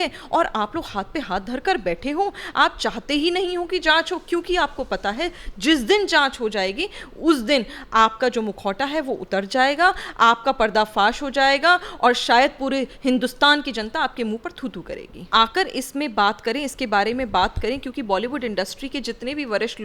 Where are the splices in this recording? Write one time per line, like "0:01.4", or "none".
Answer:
0:15.3